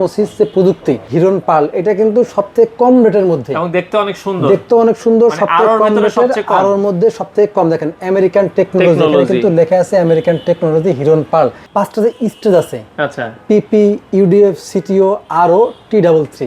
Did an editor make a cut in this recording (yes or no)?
yes